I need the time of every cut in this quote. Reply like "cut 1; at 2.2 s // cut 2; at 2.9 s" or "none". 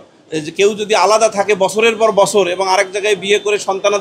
none